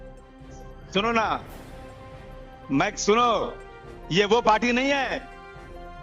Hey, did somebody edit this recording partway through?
yes; 1 cut; at 0.9 s

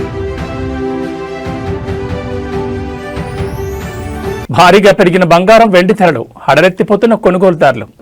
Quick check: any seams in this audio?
no; 0 cuts

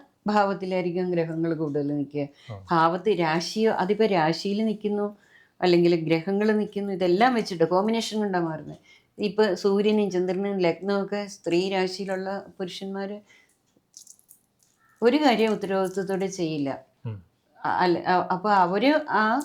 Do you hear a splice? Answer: no; 0 cuts

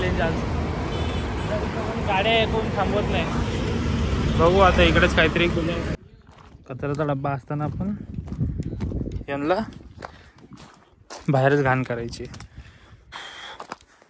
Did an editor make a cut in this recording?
yes; 2 cuts; at 5.9 s, 13.1 s

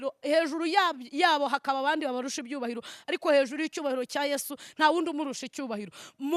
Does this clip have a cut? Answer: no; 0 cuts

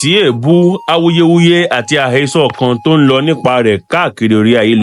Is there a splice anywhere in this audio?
no; 0 cuts

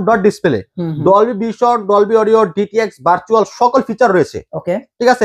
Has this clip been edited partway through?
no; 0 cuts

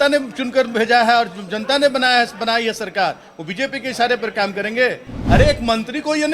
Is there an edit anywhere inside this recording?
yes; 1 cut; at 5.1 s

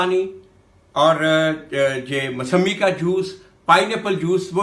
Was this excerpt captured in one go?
yes; 0 cuts

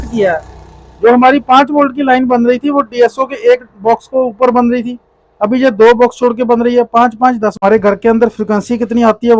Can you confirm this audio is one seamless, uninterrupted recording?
no; 1 cut; at 7.6 s

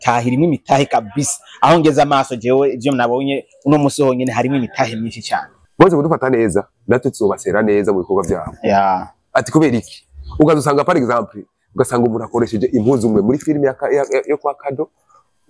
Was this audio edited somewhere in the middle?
yes; 1 cut; at 5.6 s

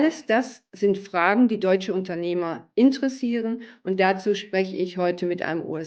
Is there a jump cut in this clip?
no; 0 cuts

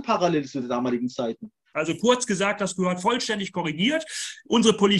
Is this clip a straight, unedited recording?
no; 1 cut; at 1.7 s

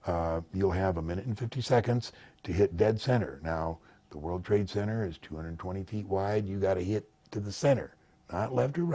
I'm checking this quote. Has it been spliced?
no; 0 cuts

